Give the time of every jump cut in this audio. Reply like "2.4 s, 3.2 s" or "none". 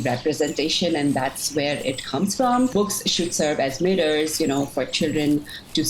2.7 s